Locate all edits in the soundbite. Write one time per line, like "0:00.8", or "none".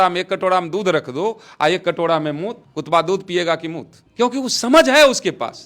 none